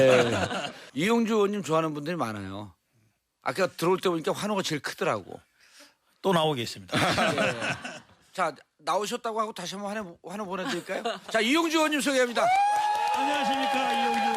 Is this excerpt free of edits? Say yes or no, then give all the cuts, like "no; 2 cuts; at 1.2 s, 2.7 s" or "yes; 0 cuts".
yes; 0 cuts